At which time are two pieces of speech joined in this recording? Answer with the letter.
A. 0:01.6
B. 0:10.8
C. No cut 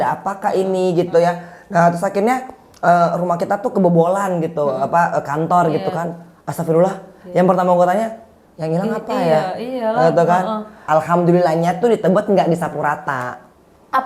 B